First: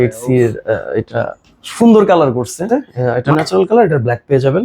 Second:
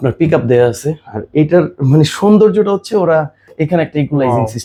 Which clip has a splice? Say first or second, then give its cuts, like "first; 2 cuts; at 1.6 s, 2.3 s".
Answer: first; 1 cut; at 2.6 s